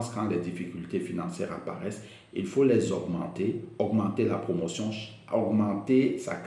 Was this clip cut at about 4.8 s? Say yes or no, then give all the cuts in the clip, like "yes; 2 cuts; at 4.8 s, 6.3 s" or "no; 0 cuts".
no; 0 cuts